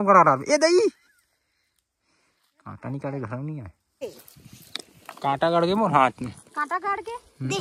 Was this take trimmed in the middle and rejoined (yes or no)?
yes